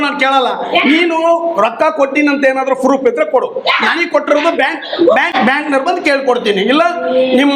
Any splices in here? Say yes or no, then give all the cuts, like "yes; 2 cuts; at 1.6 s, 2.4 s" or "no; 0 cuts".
yes; 1 cut; at 5.3 s